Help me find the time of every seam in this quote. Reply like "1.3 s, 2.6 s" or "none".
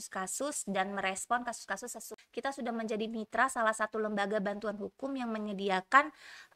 2.1 s